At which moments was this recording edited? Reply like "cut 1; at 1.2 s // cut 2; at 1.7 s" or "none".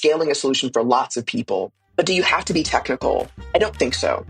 cut 1; at 1.8 s // cut 2; at 3.4 s

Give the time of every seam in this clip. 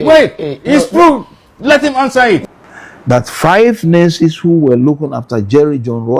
cut 1; at 2.4 s

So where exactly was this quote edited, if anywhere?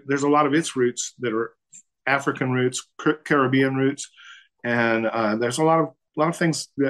cut 1; at 2.9 s // cut 2; at 6.0 s

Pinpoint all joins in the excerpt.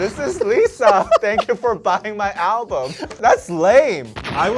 cut 1; at 3.2 s

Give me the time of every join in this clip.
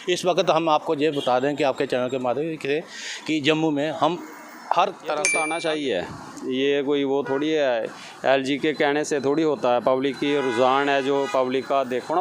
cut 1; at 5.3 s

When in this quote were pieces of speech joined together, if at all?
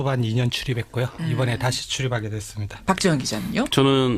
cut 1; at 1.8 s

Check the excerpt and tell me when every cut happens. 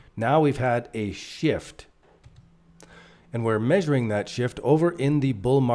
none

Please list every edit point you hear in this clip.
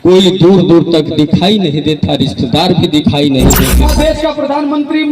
cut 1; at 3.9 s

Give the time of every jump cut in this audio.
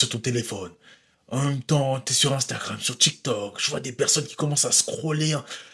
none

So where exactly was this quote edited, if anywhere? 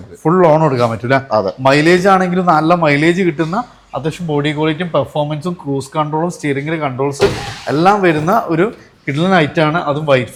none

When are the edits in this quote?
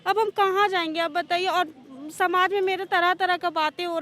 none

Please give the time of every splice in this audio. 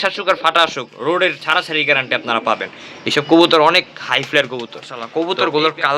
cut 1; at 5.0 s

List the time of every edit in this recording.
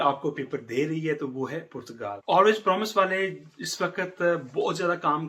cut 1; at 2.1 s

